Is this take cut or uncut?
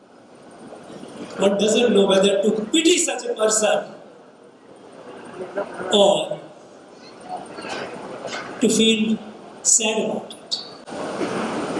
uncut